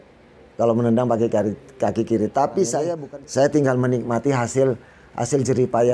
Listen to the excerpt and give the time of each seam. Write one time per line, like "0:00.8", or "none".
0:03.0